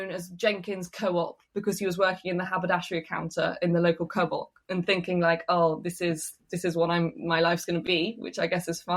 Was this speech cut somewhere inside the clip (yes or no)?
yes